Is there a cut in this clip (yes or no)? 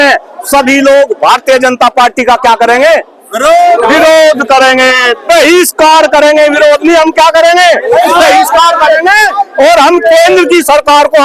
no